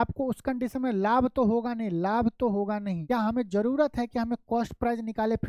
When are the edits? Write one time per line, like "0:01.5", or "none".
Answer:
0:03.0